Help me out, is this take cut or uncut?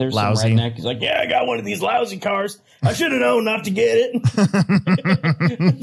uncut